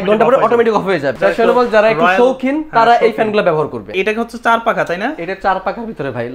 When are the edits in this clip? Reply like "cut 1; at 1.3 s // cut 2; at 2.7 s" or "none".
cut 1; at 1.1 s // cut 2; at 3.9 s